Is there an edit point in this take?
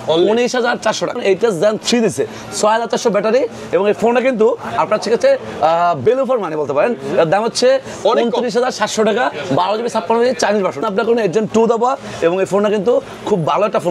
yes; 2 cuts; at 1.2 s, 10.8 s

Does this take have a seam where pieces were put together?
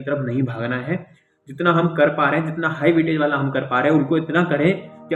no; 0 cuts

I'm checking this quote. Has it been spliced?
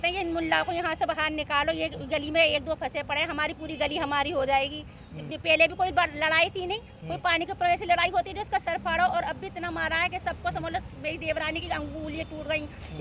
no; 0 cuts

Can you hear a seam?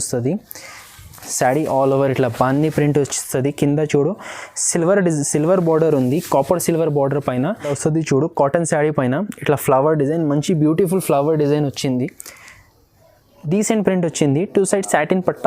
yes; 1 cut; at 7.7 s

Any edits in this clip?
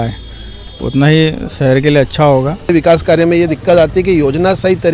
yes; 1 cut; at 2.7 s

